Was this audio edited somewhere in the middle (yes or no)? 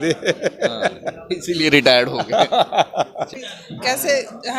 yes